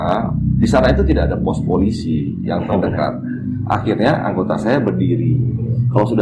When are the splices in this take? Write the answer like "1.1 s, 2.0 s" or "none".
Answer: none